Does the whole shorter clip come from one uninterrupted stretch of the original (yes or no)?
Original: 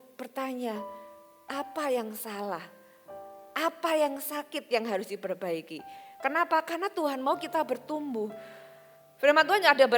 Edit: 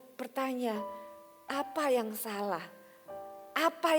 yes